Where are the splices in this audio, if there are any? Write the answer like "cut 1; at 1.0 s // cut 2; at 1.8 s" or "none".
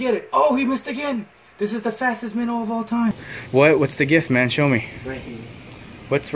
cut 1; at 3.3 s